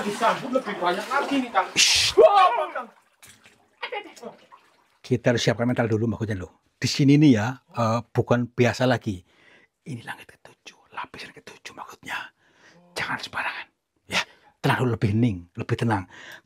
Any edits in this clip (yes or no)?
no